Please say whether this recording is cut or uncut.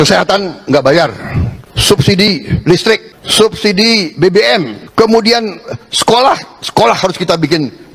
cut